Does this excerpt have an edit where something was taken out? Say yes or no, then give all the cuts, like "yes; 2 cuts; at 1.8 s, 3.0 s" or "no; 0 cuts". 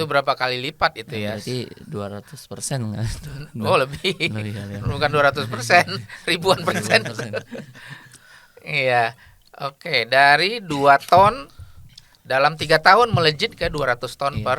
no; 0 cuts